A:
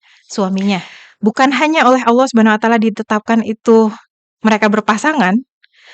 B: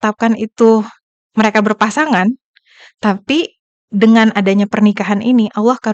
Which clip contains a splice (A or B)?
A